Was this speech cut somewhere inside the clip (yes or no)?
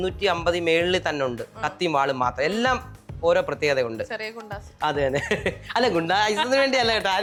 no